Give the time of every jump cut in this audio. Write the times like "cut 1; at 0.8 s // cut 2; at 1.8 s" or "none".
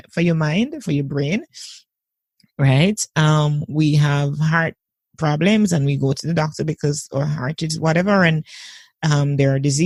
none